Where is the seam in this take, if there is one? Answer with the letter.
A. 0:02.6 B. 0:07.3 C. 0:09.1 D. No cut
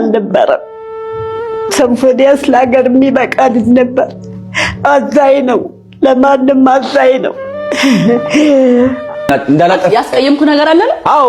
C